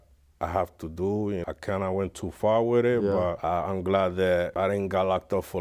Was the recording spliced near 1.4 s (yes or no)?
yes